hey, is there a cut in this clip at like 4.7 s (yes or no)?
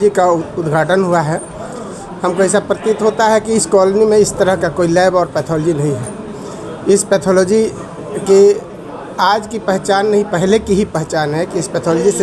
no